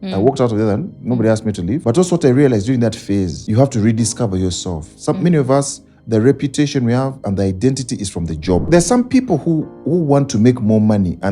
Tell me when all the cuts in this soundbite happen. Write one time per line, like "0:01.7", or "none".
0:01.8
0:03.4
0:08.6